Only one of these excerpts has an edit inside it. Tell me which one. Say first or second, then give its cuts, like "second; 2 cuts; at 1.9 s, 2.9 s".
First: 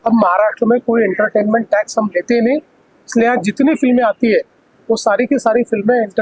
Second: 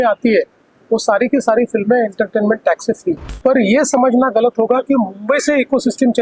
second; 1 cut; at 3.3 s